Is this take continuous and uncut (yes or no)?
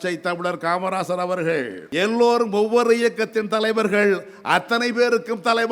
no